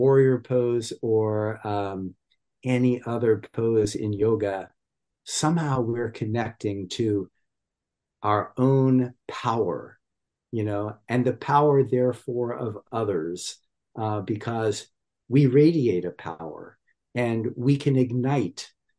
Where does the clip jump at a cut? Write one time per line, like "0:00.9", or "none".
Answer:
none